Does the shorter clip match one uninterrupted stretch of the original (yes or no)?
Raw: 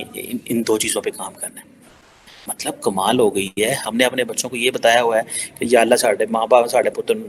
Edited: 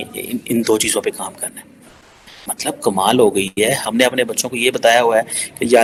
yes